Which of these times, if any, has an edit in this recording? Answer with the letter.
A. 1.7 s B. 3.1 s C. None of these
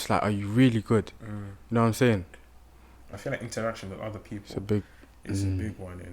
B